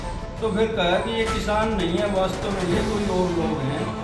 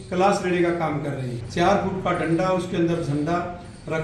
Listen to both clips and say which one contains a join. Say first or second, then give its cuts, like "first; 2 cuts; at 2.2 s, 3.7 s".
second; 1 cut; at 1.4 s